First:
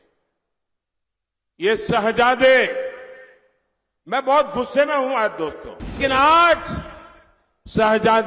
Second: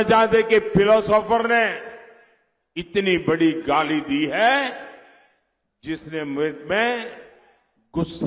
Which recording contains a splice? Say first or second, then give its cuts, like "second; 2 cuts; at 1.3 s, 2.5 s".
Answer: first; 1 cut; at 6.0 s